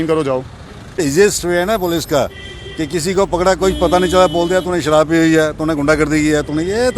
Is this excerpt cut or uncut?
cut